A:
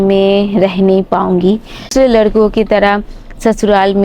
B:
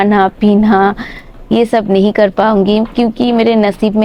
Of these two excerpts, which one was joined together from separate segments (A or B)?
A